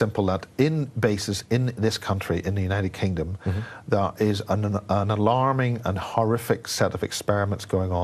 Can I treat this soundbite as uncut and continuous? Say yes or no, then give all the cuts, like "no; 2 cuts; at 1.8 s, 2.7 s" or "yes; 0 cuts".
yes; 0 cuts